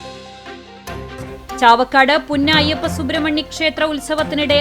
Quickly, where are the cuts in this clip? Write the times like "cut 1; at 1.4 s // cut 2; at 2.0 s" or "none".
cut 1; at 1.2 s